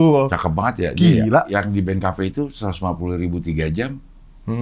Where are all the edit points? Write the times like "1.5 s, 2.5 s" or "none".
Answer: 1.5 s

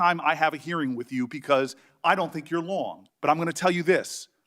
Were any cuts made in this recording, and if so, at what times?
3.0 s

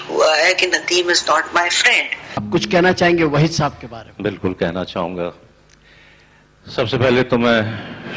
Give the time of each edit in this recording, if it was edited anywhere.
2.3 s

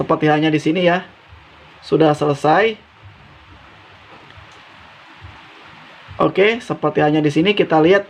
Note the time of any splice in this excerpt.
none

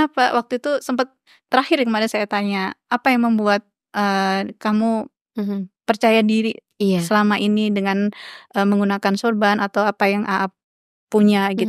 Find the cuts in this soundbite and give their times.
none

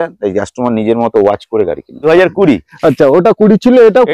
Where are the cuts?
2.0 s

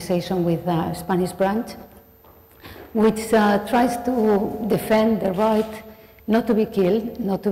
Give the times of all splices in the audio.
0.9 s

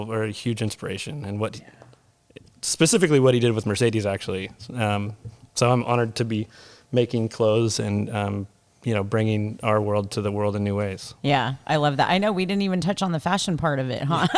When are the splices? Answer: none

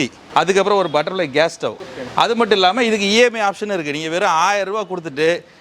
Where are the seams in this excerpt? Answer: 1.8 s

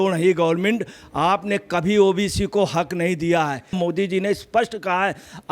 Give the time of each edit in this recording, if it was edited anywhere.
3.7 s

